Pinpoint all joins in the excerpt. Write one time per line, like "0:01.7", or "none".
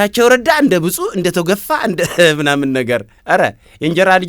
none